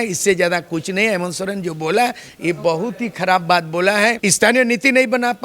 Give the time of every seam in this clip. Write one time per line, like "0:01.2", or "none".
0:04.2